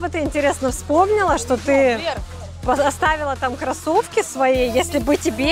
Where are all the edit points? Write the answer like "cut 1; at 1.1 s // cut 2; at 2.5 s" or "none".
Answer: none

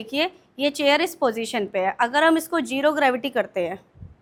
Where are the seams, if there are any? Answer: none

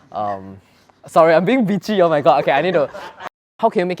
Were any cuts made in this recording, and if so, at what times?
cut 1; at 3.1 s

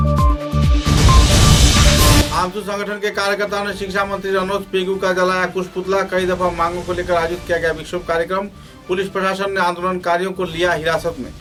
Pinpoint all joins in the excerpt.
none

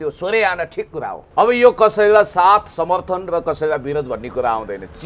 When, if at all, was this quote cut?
none

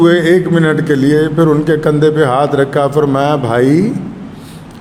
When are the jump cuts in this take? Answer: none

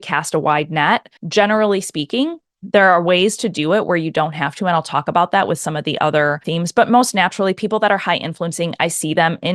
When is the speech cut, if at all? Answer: cut 1; at 1.2 s // cut 2; at 6.4 s

